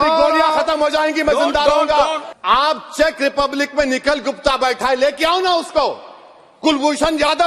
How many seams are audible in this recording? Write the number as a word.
one